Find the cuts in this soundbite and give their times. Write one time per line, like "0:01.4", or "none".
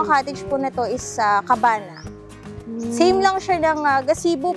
none